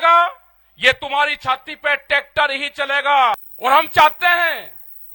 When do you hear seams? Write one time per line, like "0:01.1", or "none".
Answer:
0:03.5